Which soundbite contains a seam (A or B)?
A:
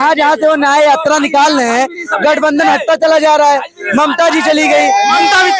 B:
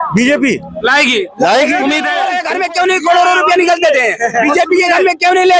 B